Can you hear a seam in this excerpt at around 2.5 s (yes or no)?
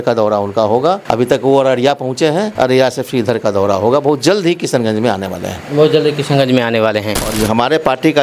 yes